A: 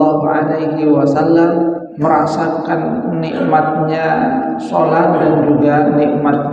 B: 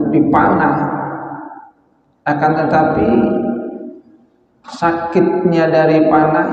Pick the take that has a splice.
A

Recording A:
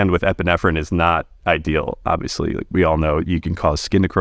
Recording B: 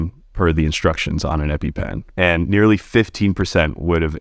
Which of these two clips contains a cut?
B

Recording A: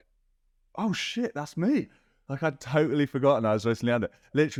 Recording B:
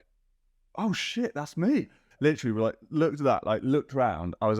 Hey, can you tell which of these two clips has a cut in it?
B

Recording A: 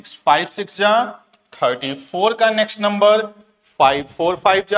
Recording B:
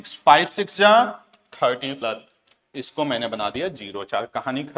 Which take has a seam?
B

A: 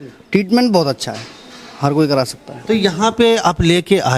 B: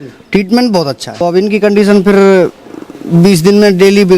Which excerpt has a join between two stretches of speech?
B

